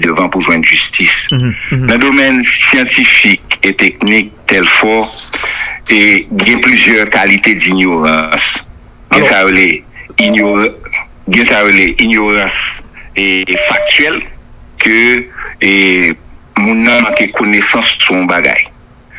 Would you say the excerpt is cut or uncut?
uncut